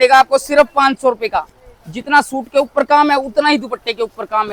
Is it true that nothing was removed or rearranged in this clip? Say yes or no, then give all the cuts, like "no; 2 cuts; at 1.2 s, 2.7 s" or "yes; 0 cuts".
yes; 0 cuts